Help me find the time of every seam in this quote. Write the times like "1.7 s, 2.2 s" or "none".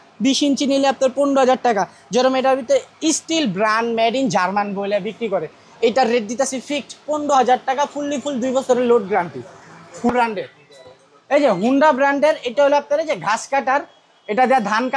10.1 s